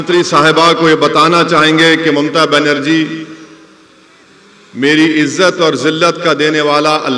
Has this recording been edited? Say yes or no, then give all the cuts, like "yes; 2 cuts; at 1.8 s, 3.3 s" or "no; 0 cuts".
no; 0 cuts